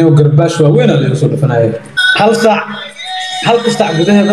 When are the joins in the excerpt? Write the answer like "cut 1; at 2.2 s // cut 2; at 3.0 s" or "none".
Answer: cut 1; at 1.9 s